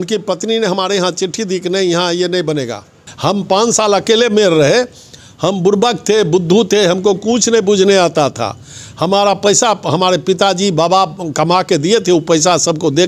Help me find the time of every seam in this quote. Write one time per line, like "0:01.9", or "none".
0:03.0

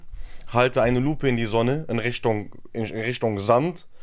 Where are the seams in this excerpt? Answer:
none

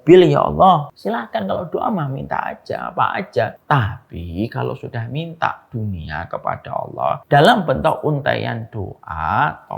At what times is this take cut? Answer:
0:00.9
0:03.6
0:07.2

